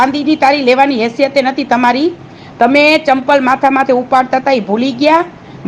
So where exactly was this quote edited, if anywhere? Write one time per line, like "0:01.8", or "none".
none